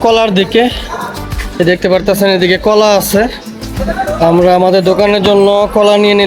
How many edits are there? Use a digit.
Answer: 0